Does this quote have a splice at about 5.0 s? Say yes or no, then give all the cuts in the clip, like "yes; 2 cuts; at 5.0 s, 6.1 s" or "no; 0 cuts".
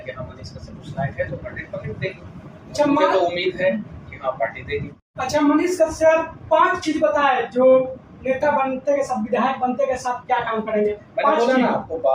yes; 1 cut; at 5.0 s